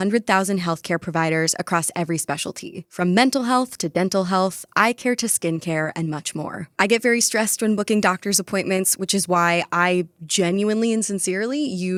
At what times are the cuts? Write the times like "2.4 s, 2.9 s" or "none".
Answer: none